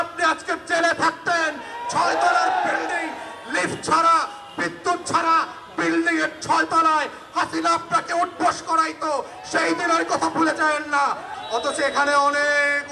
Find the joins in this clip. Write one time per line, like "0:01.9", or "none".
0:11.3